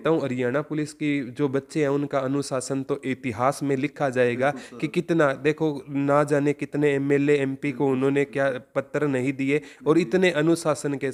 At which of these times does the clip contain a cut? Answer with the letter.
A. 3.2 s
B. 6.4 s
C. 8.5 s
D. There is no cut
D